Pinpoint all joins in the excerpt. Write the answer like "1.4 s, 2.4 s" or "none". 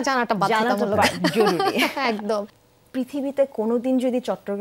2.5 s